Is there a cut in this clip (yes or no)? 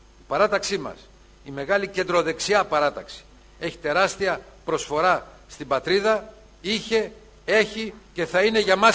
no